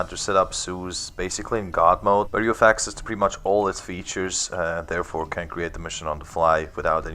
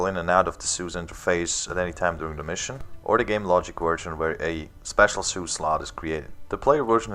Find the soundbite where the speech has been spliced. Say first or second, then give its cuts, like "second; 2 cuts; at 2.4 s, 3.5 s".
first; 1 cut; at 2.2 s